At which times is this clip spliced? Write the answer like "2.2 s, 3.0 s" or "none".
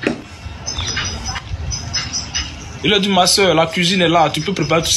2.4 s